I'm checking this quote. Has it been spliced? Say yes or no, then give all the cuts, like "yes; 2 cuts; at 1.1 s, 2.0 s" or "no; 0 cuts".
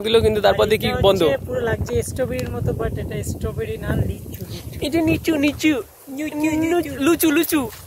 no; 0 cuts